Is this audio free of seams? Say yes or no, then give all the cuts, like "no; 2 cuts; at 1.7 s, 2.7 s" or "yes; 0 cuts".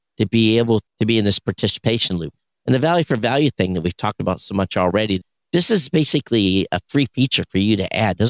no; 3 cuts; at 0.9 s, 2.3 s, 5.2 s